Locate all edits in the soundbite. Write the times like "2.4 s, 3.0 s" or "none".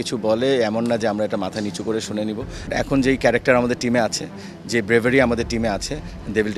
2.7 s